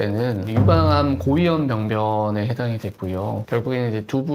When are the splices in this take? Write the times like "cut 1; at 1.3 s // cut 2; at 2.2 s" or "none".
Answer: cut 1; at 3.4 s